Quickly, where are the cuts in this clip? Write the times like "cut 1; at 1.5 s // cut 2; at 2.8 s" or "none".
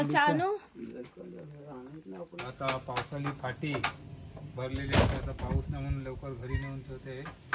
cut 1; at 2.4 s